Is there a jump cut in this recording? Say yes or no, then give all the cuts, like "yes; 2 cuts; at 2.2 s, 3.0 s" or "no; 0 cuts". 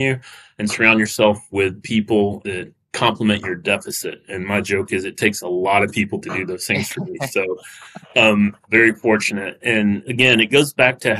yes; 2 cuts; at 8.6 s, 10.1 s